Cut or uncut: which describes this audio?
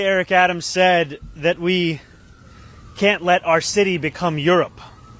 uncut